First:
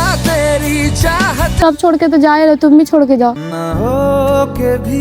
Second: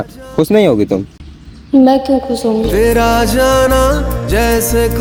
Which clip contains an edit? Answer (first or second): first